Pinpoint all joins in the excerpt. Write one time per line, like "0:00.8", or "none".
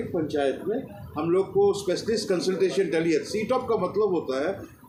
none